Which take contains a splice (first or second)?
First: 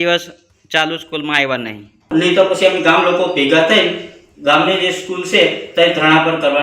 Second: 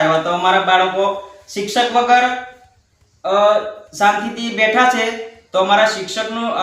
first